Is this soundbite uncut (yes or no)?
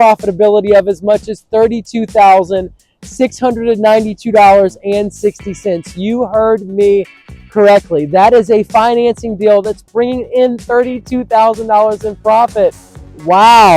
yes